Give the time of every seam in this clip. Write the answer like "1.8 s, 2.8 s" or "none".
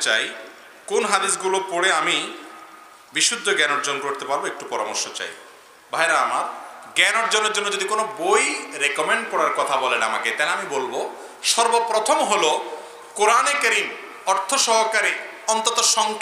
none